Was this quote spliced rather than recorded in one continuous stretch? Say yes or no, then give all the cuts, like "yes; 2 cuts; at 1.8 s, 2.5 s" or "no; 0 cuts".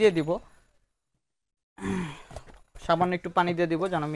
no; 0 cuts